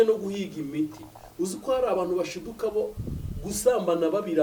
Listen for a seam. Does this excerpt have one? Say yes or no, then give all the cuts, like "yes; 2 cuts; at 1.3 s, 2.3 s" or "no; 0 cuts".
no; 0 cuts